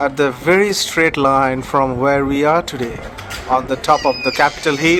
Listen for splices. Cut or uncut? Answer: uncut